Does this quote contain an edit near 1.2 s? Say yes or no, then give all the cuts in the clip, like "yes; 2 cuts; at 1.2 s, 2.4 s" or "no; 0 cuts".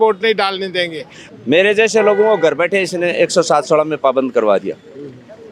yes; 1 cut; at 1.2 s